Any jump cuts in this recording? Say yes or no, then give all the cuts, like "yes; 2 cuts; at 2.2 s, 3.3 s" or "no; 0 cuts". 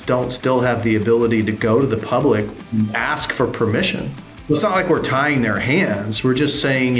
yes; 2 cuts; at 2.6 s, 4.3 s